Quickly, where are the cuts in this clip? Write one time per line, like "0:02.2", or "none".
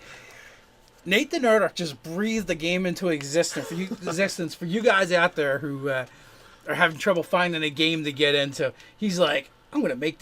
0:08.3

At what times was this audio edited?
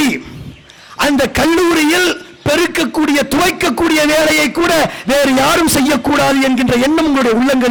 none

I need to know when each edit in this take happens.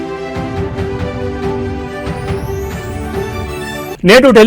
none

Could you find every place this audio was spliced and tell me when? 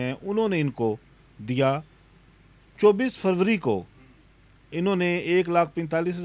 none

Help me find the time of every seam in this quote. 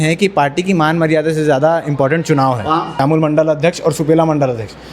0:03.0

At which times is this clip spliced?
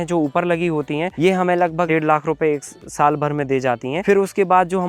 0:01.1
0:01.9
0:04.0

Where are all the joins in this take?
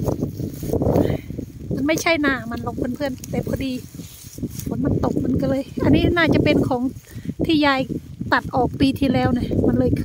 none

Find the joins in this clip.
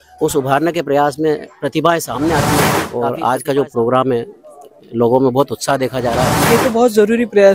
0:02.8
0:06.4

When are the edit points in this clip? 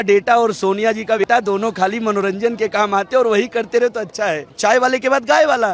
0:01.2
0:04.5

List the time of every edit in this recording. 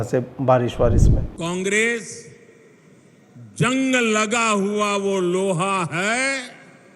0:01.2

